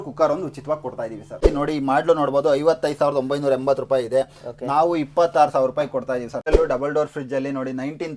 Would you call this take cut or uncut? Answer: cut